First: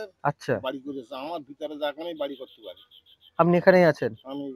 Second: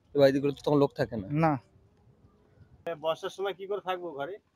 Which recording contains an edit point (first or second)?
second